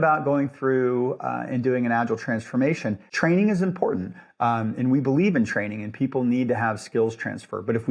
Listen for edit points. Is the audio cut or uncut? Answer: cut